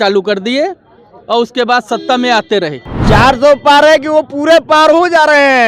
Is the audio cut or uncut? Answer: cut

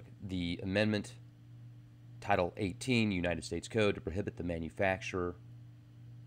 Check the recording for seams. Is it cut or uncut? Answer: cut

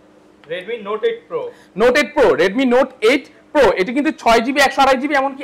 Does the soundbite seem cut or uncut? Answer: uncut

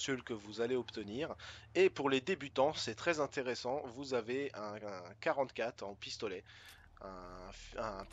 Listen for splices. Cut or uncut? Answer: uncut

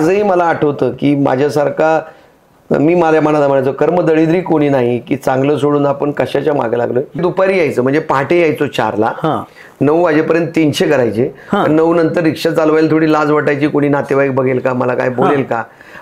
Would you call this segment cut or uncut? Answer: cut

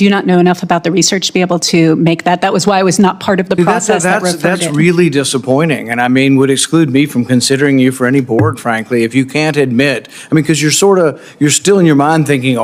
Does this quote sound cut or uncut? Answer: uncut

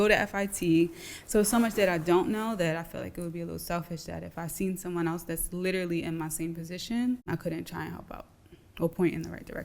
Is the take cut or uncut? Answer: cut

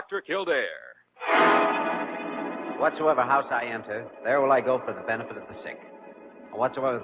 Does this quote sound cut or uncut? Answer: uncut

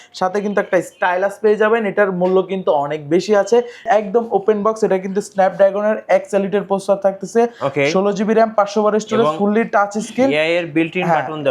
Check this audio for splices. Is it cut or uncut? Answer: cut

